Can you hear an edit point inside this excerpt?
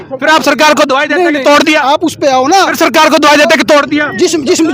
no; 0 cuts

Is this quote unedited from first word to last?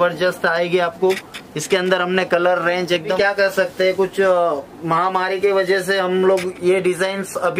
no; 1 cut; at 3.1 s

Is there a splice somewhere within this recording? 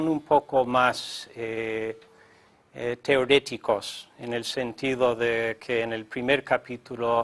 no; 0 cuts

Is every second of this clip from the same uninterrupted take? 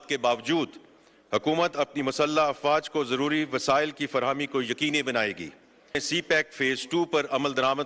no; 1 cut; at 6.0 s

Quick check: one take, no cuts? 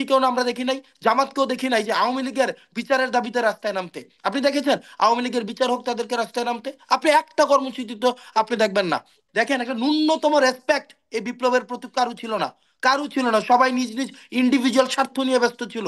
no; 1 cut; at 9.2 s

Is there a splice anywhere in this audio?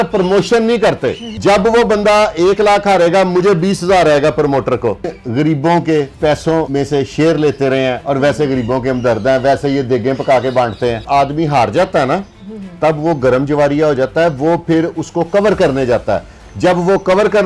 yes; 4 cuts; at 1.3 s, 5.2 s, 6.5 s, 11.0 s

